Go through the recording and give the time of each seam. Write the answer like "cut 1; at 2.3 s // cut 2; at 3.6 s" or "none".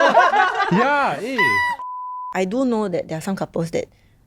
cut 1; at 2.2 s